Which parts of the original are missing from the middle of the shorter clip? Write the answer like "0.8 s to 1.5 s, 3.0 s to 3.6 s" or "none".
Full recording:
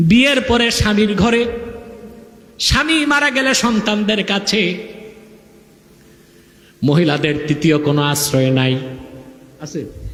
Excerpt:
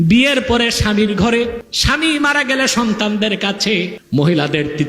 1.7 s to 2.6 s, 4.8 s to 6.7 s

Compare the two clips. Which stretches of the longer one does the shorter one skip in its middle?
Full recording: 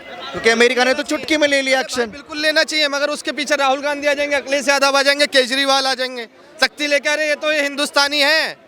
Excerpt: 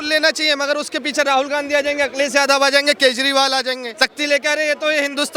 6.2 s to 6.5 s

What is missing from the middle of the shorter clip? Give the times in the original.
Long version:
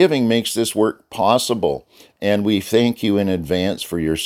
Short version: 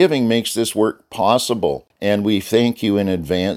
1.9 s to 2.1 s

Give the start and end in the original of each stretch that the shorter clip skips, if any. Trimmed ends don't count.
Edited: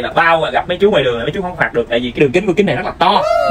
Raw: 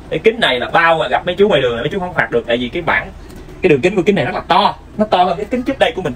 2.8 s to 3.7 s

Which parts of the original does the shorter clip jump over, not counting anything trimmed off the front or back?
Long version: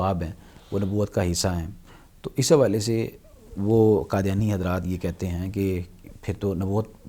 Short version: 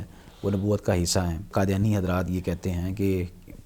1.8 s to 4.1 s

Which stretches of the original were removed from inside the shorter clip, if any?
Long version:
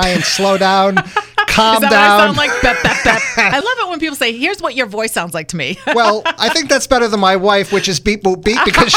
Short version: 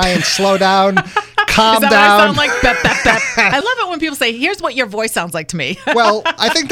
none

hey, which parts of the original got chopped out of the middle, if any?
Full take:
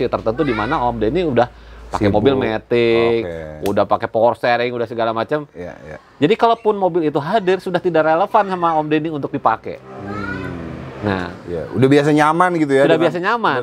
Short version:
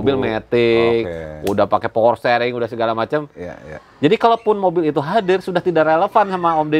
none

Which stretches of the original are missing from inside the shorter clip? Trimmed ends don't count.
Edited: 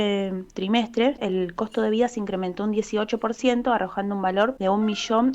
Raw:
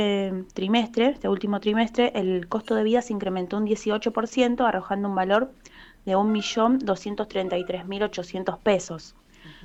1.2 s to 2.1 s, 5.5 s to 6.0 s

